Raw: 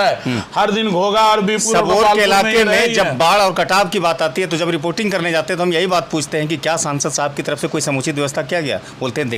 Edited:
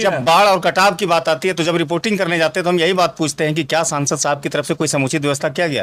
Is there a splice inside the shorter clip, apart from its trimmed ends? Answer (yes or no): no